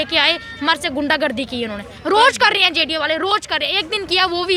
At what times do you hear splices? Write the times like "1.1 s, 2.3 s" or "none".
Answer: none